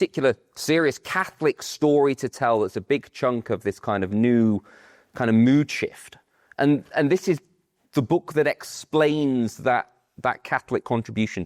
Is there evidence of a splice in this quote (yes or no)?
no